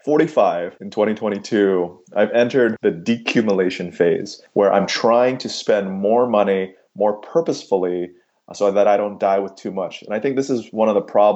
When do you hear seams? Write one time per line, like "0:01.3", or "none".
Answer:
none

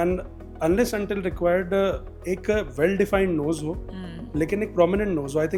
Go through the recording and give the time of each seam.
none

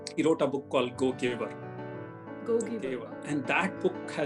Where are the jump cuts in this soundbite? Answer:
0:02.9

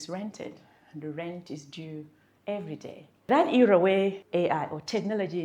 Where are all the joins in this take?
0:03.3
0:04.2

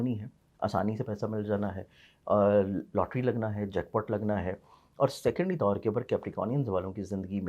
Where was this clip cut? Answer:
none

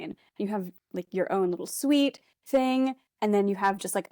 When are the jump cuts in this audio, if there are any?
none

